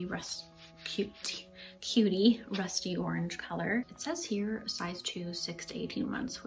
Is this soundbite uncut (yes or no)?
no